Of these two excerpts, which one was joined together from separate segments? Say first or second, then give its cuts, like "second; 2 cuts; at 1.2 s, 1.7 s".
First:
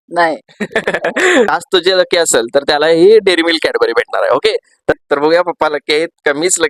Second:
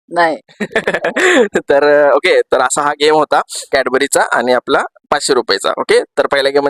first; 2 cuts; at 1.5 s, 5.0 s